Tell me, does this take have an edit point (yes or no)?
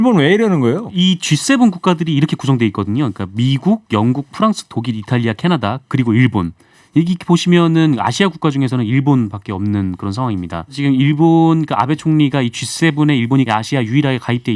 yes